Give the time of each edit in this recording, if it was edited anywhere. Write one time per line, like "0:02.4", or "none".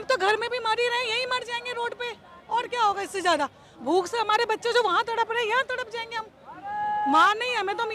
none

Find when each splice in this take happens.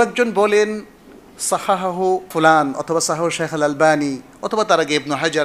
0:02.3

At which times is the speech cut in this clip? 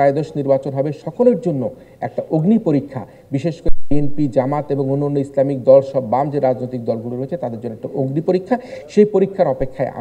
none

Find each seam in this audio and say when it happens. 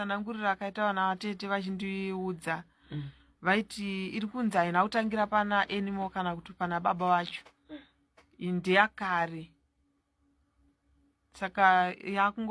none

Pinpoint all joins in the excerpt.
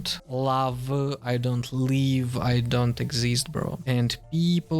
0:03.8

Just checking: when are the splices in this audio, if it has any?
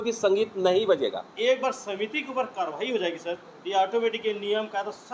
0:01.3

